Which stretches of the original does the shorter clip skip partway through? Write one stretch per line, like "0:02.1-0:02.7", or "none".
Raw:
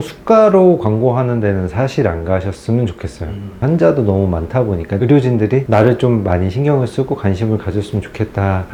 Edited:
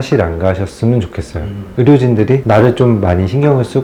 0:03.5-0:04.9